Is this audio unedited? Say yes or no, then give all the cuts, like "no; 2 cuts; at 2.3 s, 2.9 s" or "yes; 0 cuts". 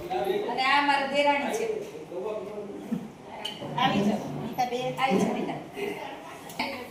yes; 0 cuts